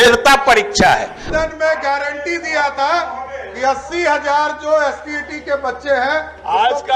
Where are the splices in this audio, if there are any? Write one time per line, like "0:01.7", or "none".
0:01.2